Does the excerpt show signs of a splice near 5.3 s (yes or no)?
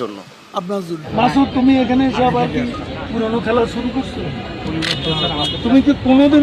no